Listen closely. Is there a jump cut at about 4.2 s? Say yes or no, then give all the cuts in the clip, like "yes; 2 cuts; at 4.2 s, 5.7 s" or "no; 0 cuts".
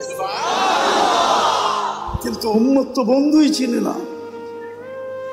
yes; 1 cut; at 4.2 s